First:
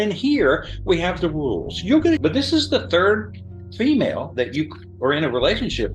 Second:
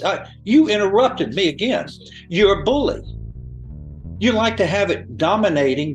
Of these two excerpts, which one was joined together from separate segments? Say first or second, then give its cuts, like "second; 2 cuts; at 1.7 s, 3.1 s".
first; 1 cut; at 2.2 s